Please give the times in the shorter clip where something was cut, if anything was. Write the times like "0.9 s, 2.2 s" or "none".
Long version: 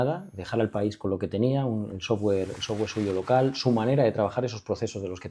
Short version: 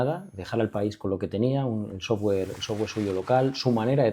none